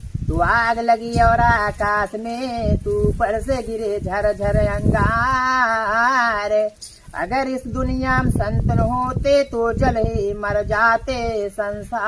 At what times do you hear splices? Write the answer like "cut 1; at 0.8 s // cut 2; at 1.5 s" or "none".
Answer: none

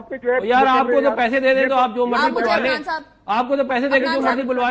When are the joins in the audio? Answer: none

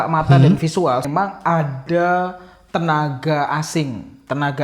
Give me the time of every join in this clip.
cut 1; at 1.1 s

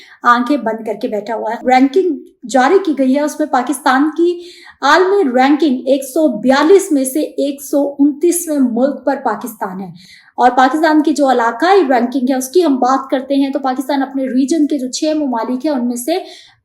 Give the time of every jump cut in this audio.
cut 1; at 1.6 s

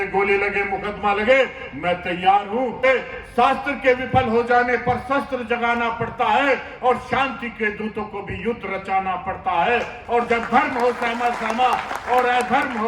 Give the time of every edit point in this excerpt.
cut 1; at 2.8 s

